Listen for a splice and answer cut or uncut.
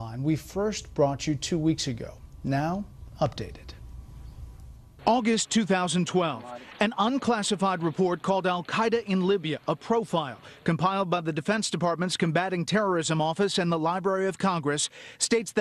cut